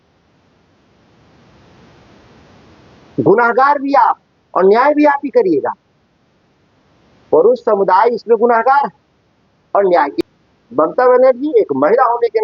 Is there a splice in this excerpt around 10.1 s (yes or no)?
yes